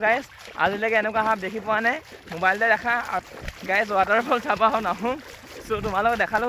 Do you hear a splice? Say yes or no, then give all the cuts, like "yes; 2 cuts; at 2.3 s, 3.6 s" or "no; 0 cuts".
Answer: yes; 2 cuts; at 3.2 s, 5.4 s